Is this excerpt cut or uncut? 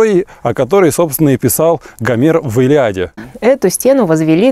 cut